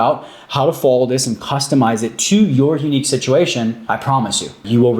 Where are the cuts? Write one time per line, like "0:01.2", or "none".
0:04.0